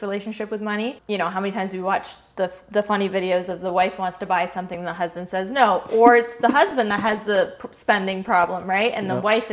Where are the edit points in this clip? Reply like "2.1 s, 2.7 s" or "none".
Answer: 1.0 s

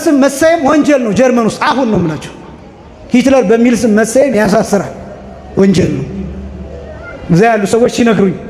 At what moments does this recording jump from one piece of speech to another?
none

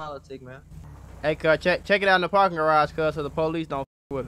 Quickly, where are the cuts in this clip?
0.9 s

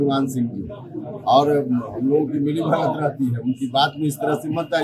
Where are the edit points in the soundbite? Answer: none

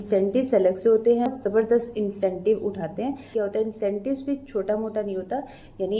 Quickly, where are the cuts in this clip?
1.3 s, 3.3 s

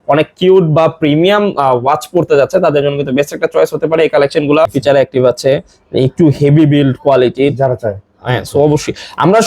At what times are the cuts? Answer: 4.8 s

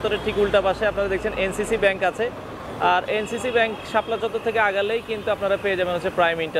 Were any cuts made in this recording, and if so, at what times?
none

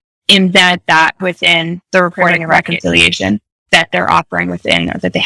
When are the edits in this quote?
2.6 s, 3.7 s

